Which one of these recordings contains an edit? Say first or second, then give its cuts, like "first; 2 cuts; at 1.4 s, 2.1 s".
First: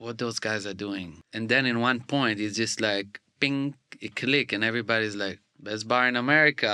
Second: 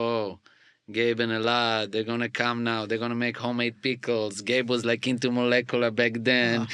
first; 2 cuts; at 1.2 s, 5.5 s